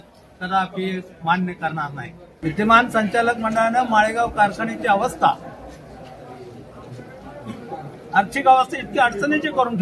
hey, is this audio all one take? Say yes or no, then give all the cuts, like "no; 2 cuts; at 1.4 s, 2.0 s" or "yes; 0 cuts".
no; 1 cut; at 2.2 s